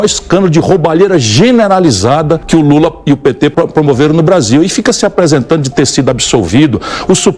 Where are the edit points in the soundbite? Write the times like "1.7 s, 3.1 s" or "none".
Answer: 2.4 s, 3.5 s